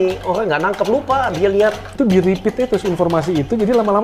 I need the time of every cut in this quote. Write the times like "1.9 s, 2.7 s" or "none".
1.9 s